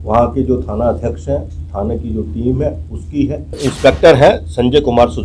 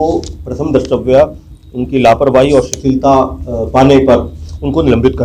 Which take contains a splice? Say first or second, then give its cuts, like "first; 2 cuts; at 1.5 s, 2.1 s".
first; 1 cut; at 3.6 s